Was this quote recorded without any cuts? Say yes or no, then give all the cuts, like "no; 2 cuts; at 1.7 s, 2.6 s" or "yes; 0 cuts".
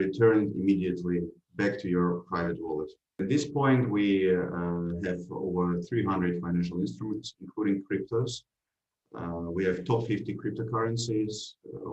no; 1 cut; at 3.2 s